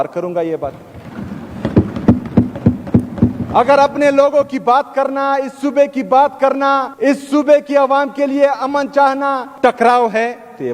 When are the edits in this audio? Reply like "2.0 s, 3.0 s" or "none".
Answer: 6.9 s, 9.5 s